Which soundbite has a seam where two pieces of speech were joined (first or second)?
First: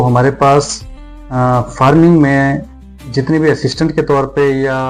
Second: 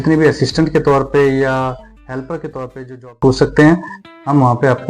second